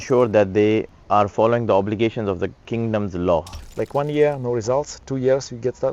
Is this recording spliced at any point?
yes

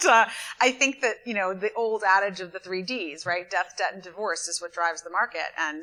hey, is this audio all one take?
yes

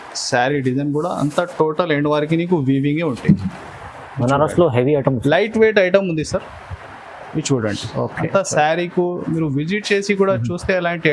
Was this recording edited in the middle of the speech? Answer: no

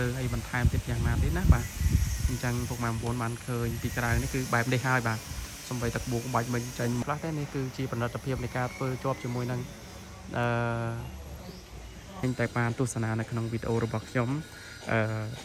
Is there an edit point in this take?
yes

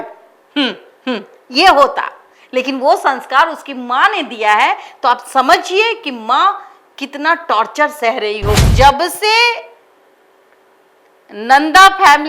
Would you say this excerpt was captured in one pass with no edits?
no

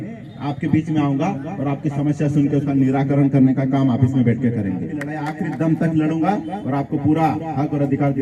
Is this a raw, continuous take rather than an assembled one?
no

